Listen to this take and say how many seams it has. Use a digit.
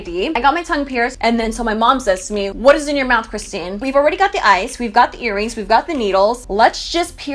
3